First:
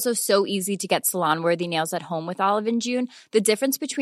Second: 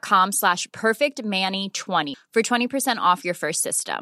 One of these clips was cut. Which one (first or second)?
second